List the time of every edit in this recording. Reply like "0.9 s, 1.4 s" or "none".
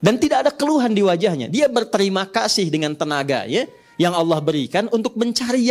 none